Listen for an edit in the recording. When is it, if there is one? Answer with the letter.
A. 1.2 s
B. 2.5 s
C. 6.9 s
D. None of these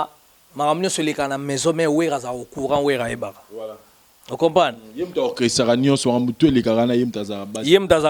D